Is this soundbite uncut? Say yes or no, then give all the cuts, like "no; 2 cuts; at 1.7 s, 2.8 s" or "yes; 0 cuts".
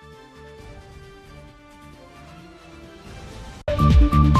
yes; 0 cuts